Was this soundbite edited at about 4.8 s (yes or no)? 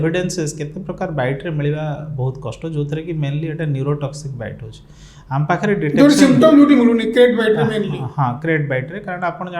no